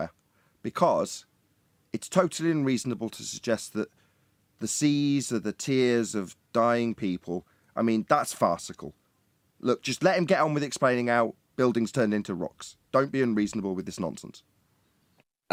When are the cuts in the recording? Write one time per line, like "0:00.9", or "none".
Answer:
none

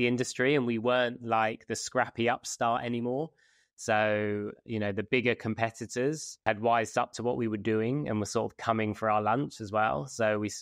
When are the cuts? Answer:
none

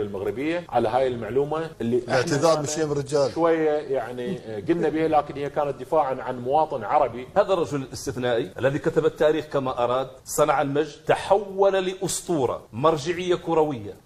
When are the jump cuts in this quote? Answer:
0:07.2

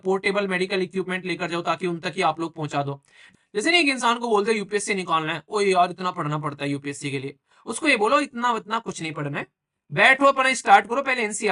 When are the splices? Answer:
0:03.2

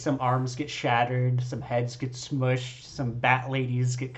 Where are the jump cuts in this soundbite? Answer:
none

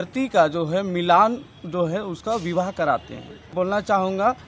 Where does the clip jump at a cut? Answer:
0:03.5

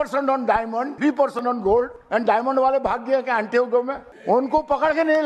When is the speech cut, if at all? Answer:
0:00.9
0:02.0
0:04.1

